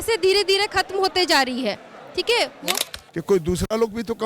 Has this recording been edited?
yes; 1 cut; at 2.7 s

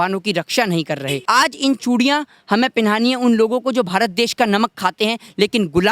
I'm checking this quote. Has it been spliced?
yes; 1 cut; at 1.2 s

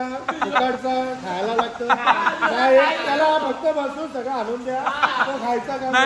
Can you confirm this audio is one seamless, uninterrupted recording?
yes; 0 cuts

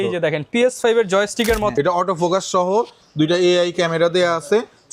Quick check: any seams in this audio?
yes; 1 cut; at 1.7 s

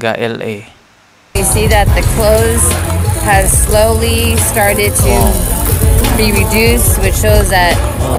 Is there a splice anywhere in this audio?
no; 0 cuts

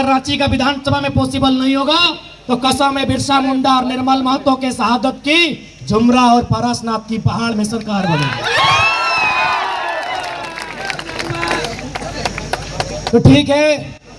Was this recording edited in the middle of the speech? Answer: no; 0 cuts

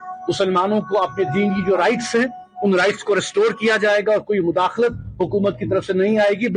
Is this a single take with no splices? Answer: yes; 0 cuts

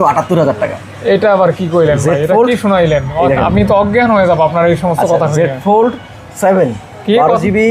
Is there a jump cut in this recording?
no; 0 cuts

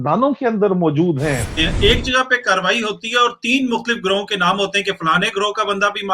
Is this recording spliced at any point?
yes; 1 cut; at 1.5 s

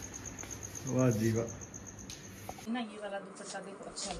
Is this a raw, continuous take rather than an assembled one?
no; 1 cut; at 2.6 s

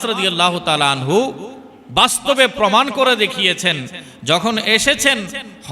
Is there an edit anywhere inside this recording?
no; 0 cuts

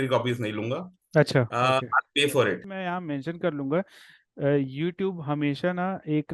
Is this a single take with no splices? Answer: no; 1 cut; at 2.7 s

